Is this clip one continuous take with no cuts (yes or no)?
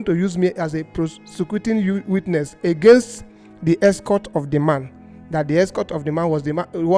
yes